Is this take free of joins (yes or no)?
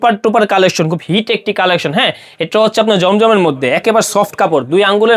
yes